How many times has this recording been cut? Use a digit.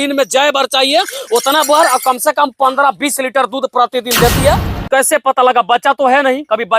1